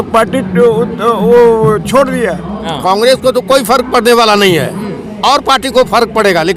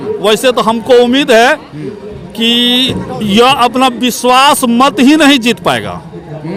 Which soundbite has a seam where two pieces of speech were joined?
first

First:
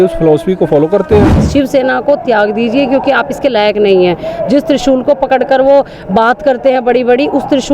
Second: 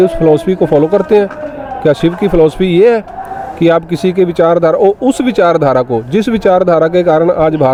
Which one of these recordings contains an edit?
first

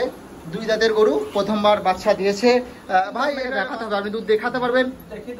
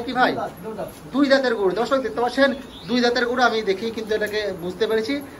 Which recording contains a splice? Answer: first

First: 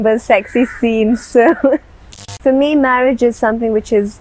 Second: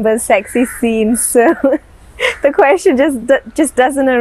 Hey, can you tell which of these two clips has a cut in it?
first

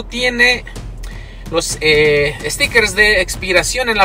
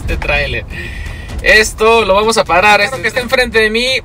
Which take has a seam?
second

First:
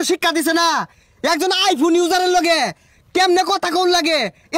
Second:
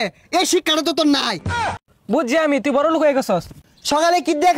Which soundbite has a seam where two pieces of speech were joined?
second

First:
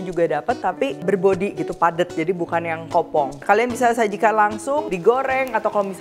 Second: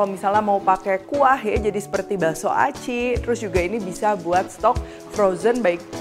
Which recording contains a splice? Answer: first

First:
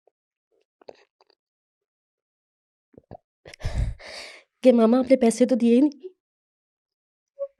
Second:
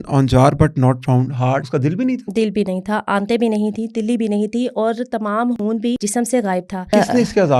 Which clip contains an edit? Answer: second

